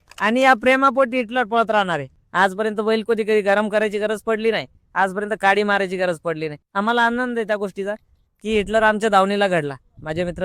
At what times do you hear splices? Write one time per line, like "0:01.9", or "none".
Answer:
0:02.2
0:06.6